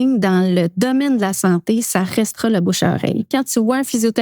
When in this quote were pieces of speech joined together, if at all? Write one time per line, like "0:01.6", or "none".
0:03.3